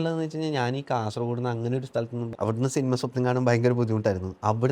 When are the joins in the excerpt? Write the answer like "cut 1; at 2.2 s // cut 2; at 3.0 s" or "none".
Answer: cut 1; at 2.3 s